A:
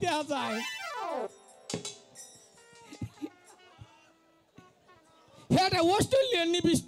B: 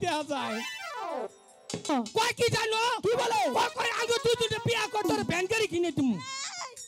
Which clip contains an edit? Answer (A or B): B